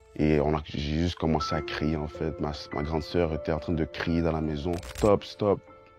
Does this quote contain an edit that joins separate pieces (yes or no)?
yes